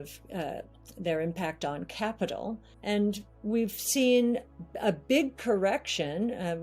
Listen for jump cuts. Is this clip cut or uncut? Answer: cut